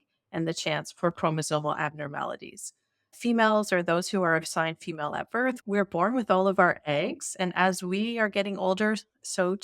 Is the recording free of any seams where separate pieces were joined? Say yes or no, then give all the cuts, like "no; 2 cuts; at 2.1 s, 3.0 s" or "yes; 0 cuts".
no; 1 cut; at 5.6 s